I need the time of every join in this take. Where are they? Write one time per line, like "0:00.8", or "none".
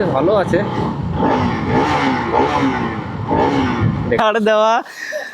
0:04.2